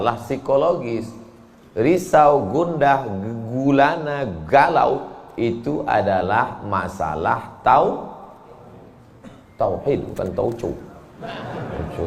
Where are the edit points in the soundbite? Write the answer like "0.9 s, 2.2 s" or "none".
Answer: none